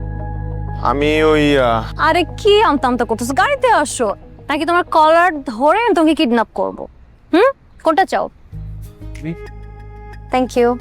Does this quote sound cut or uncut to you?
cut